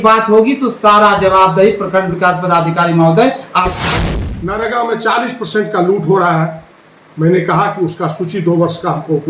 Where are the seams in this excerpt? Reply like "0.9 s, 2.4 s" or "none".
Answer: 3.9 s